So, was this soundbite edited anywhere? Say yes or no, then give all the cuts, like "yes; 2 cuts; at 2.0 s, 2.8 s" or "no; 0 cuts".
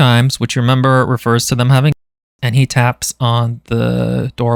no; 0 cuts